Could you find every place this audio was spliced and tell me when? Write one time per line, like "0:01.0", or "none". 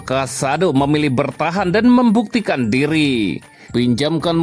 0:03.5